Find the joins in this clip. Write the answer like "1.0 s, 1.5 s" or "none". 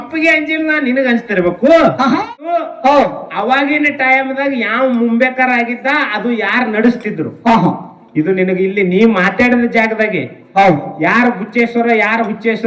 2.7 s